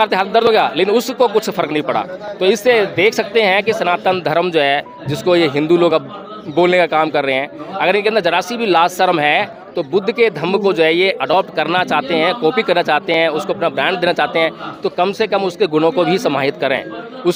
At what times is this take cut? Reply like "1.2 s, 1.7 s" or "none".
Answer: none